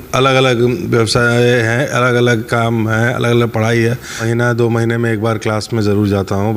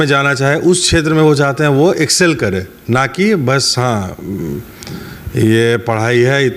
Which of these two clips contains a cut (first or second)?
first